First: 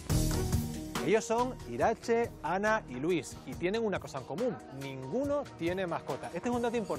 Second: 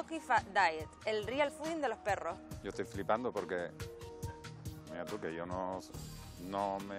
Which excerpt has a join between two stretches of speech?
first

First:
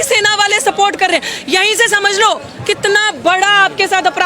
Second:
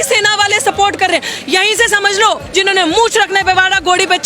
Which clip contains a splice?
second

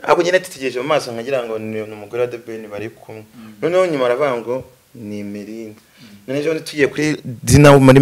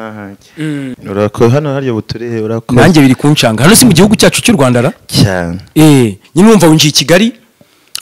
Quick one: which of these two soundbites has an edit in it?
second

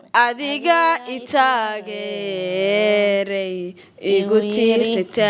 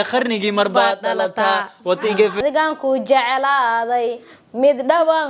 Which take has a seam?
second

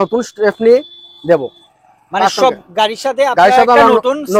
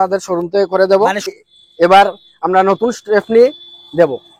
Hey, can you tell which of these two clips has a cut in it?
second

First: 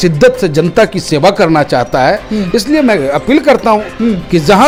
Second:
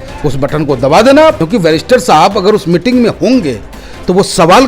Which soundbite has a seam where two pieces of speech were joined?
second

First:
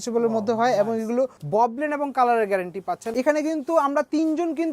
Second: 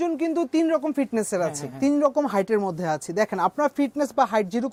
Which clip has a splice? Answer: first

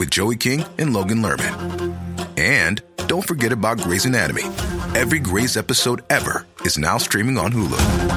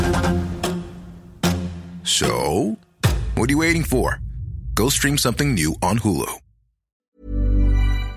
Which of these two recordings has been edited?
second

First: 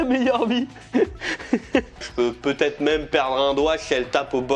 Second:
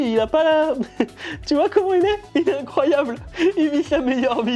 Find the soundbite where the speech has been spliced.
first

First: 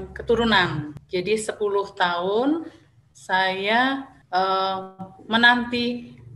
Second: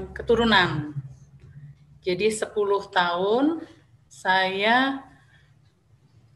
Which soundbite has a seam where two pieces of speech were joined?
first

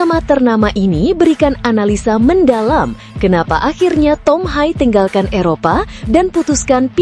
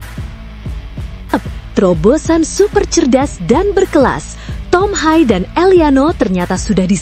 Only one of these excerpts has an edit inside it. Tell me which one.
second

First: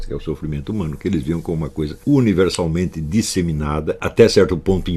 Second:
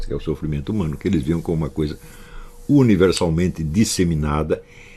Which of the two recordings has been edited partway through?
first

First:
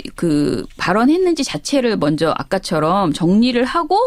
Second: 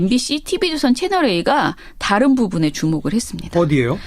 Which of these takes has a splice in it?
second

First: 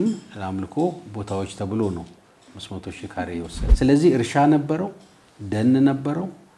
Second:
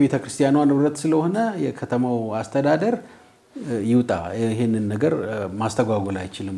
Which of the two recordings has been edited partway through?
first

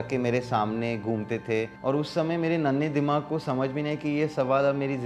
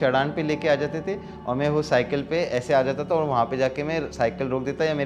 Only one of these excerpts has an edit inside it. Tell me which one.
first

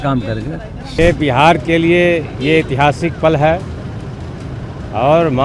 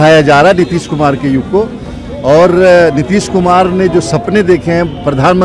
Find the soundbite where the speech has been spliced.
first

